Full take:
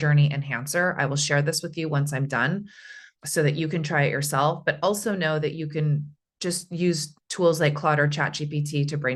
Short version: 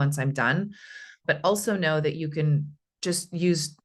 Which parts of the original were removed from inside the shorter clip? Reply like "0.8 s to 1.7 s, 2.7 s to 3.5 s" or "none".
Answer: 3.2 s to 4.6 s